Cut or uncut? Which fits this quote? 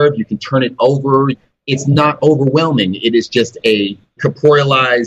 cut